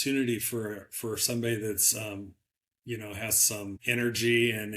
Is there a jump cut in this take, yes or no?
yes